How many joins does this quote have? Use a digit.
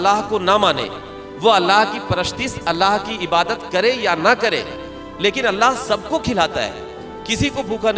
0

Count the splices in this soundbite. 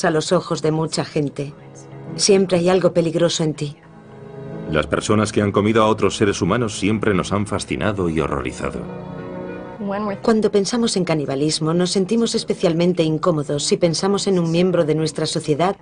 1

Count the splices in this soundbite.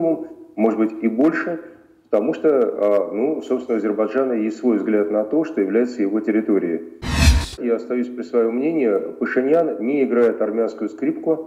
1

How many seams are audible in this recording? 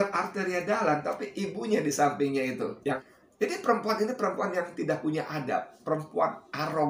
1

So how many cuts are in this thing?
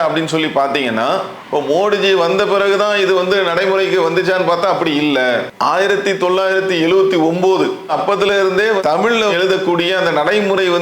1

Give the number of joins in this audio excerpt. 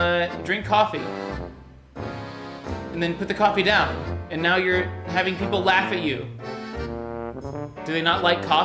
0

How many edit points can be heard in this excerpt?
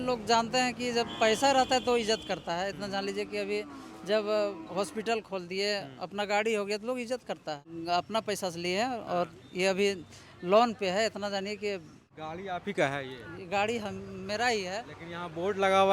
2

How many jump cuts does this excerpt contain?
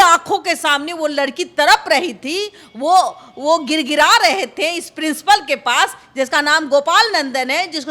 0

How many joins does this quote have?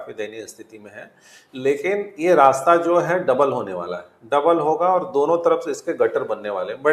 0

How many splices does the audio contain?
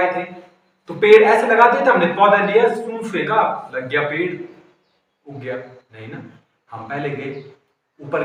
0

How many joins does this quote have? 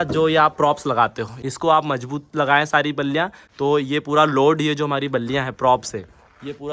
2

